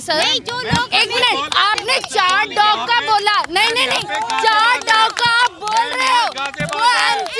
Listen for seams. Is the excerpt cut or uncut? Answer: uncut